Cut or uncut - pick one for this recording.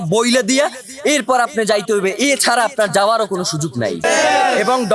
cut